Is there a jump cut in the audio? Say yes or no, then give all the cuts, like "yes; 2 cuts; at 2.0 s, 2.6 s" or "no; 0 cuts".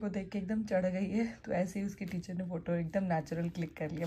no; 0 cuts